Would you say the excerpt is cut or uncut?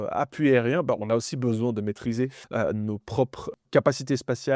cut